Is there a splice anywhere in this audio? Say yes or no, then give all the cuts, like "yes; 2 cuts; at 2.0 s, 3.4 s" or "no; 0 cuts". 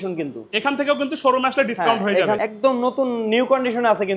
yes; 1 cut; at 2.4 s